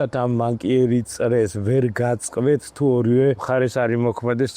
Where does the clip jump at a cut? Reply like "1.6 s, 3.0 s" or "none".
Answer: 3.4 s